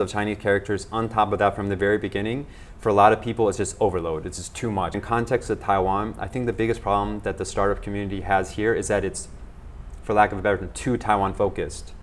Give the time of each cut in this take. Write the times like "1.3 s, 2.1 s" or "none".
5.0 s